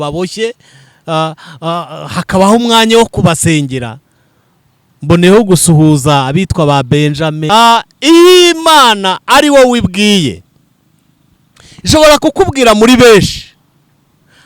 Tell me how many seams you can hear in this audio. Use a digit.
1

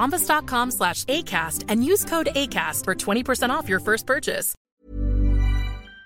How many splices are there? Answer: 1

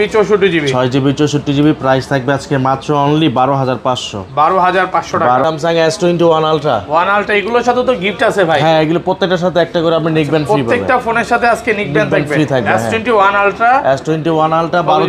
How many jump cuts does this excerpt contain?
1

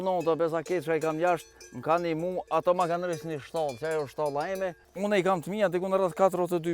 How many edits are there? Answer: 1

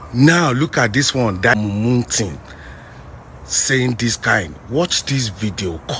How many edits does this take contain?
1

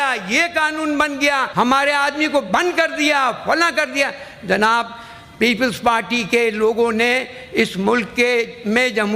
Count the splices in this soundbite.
1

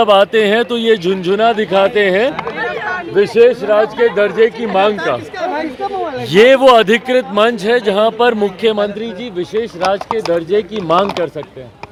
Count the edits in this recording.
0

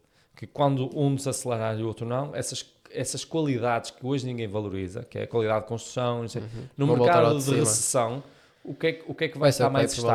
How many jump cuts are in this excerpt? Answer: 0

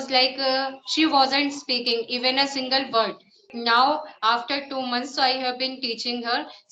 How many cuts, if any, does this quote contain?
1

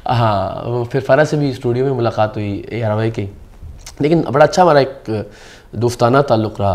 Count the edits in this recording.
0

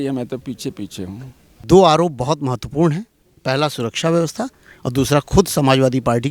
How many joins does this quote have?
1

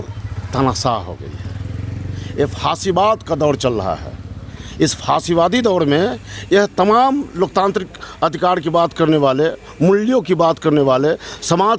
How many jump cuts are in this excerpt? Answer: 0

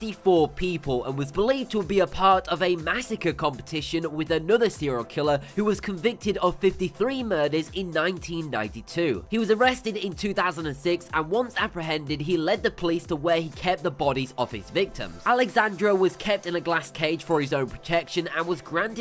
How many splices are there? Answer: 0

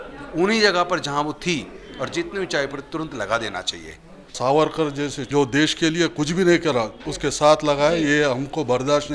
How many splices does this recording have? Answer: 3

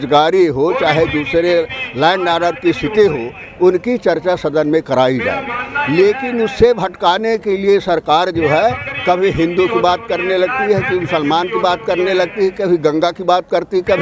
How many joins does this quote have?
0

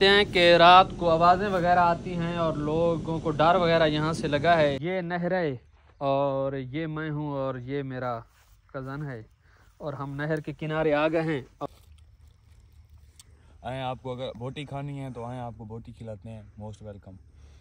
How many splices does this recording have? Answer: 2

